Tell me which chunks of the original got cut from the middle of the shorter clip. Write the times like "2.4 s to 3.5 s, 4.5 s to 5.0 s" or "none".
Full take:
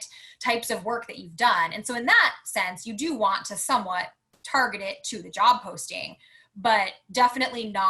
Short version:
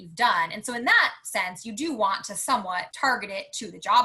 4.1 s to 4.4 s